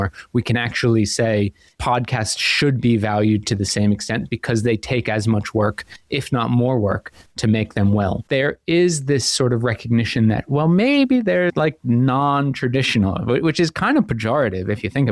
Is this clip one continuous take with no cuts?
no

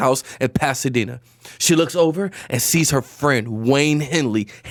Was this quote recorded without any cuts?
yes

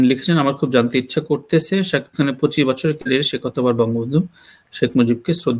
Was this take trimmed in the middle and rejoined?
no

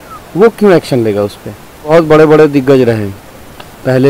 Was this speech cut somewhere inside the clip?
yes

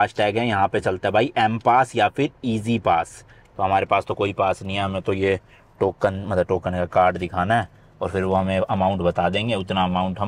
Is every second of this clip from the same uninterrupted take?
yes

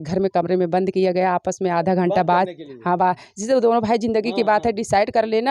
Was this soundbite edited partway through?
no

